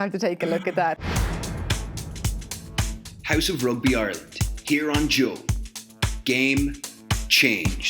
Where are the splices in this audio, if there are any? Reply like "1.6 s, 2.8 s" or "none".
1.1 s